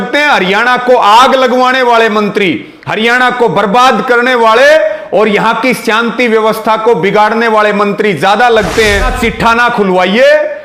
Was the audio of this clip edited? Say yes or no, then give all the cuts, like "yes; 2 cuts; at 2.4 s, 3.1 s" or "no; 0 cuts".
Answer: yes; 1 cut; at 9.1 s